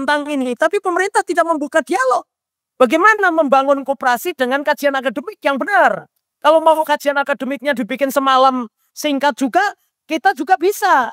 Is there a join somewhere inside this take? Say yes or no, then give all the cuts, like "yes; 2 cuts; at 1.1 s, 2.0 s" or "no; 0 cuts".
no; 0 cuts